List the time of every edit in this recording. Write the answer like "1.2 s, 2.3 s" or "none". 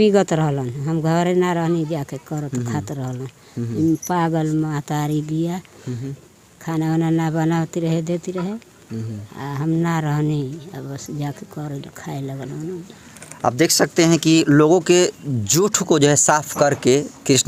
none